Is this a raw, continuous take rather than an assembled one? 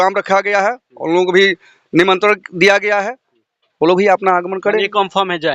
yes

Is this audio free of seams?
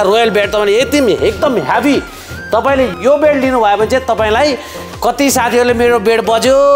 no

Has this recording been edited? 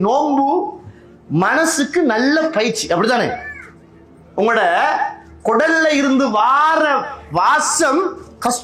no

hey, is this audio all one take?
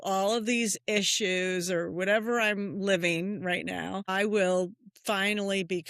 no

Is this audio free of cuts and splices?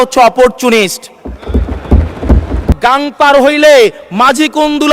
no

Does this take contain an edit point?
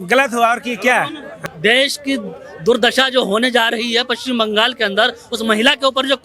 yes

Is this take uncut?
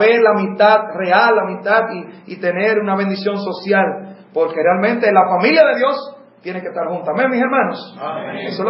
no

